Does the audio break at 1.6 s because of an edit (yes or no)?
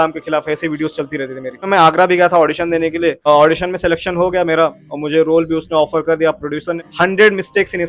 yes